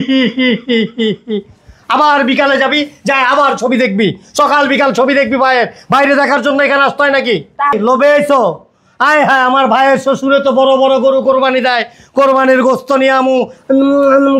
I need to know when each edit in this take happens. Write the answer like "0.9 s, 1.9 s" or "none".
7.7 s